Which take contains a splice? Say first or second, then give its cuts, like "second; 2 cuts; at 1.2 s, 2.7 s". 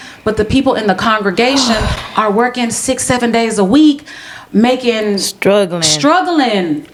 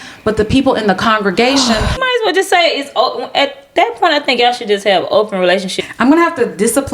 second; 2 cuts; at 2.0 s, 5.7 s